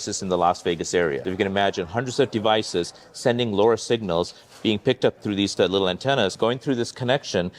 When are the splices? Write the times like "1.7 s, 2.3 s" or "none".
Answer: 1.2 s, 5.2 s, 6.3 s